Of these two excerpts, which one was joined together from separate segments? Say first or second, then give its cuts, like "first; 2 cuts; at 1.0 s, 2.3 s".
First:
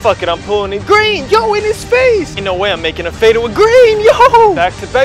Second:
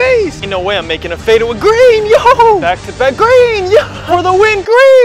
second; 1 cut; at 4.1 s